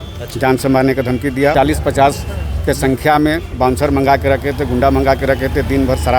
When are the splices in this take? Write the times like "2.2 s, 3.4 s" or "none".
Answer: 1.5 s

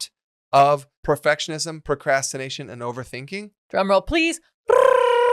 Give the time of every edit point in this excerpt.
0.9 s, 3.6 s

